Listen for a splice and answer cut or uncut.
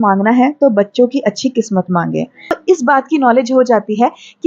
cut